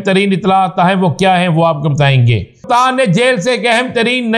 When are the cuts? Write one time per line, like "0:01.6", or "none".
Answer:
0:02.6

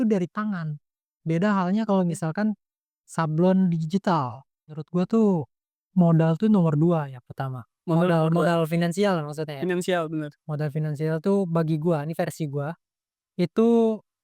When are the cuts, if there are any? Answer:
0:04.8

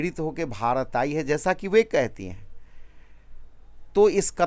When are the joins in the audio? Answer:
none

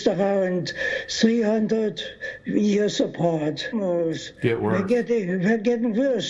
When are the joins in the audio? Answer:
none

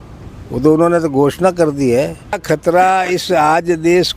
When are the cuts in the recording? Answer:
0:02.4

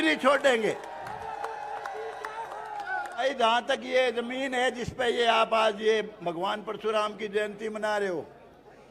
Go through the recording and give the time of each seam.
0:03.2

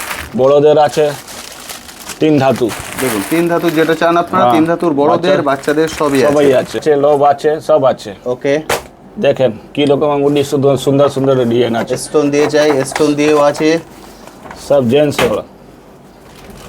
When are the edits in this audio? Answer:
0:06.8

